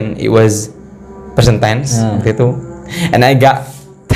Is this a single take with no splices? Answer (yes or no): yes